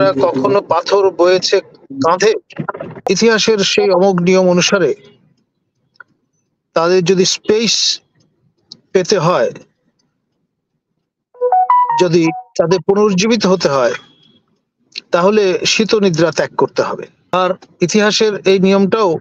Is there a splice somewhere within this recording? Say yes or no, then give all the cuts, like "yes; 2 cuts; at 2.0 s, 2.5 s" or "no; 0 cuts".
yes; 2 cuts; at 2.9 s, 17.1 s